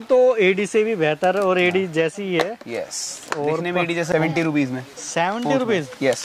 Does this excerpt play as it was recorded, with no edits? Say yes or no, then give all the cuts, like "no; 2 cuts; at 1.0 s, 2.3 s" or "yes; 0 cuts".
no; 1 cut; at 4.1 s